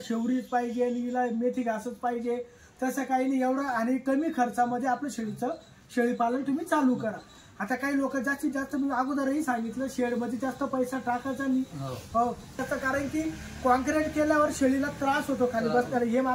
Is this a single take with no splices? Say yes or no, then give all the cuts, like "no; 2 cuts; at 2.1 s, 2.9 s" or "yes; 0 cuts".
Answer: no; 1 cut; at 12.6 s